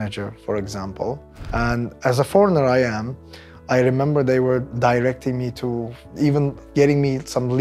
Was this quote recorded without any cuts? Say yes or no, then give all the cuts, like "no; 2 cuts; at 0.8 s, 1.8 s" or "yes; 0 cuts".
no; 3 cuts; at 1.3 s, 4.7 s, 6.6 s